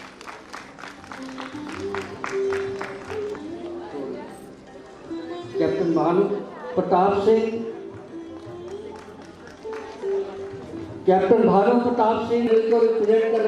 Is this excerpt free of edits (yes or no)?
no